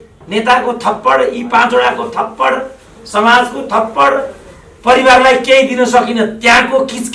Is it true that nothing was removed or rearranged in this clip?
yes; 0 cuts

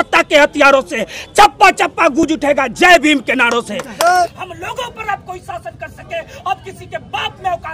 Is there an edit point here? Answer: yes; 1 cut; at 4.3 s

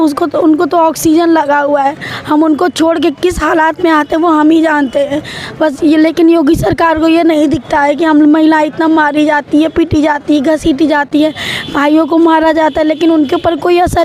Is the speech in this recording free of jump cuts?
yes; 0 cuts

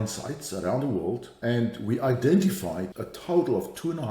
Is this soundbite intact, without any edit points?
no; 2 cuts; at 1.3 s, 2.9 s

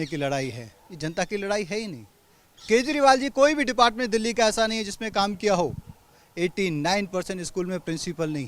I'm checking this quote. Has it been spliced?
no; 0 cuts

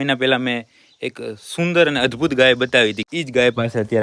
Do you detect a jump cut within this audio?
yes; 1 cut; at 3.1 s

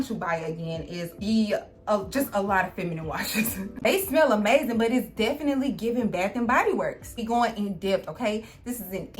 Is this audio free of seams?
no; 2 cuts; at 3.7 s, 7.2 s

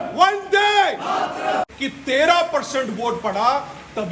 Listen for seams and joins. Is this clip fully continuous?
no; 1 cut; at 1.8 s

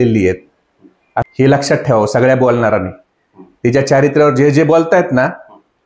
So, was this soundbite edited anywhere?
yes; 1 cut; at 1.3 s

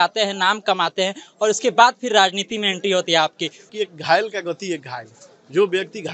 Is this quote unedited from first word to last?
no; 1 cut; at 3.7 s

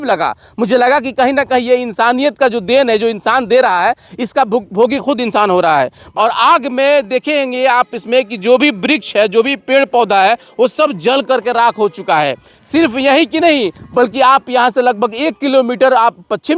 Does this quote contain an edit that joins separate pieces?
yes; 1 cut; at 6.0 s

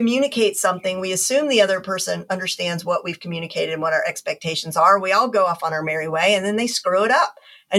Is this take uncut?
yes; 0 cuts

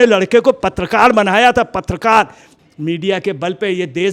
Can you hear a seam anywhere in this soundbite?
yes; 1 cut; at 2.4 s

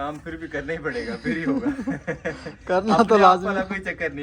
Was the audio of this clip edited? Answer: no; 0 cuts

